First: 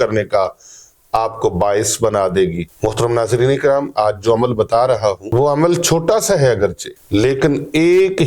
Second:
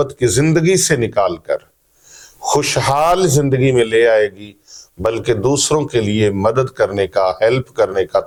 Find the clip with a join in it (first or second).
first